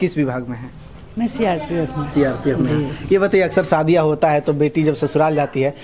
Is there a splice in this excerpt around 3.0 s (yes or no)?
no